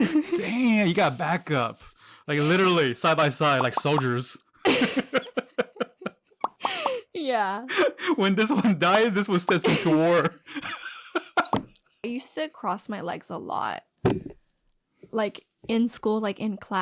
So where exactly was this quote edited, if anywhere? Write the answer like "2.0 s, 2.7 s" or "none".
12.1 s